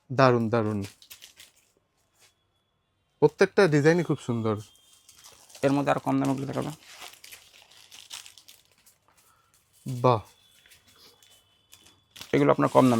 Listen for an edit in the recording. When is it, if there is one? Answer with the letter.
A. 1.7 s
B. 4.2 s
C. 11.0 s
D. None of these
D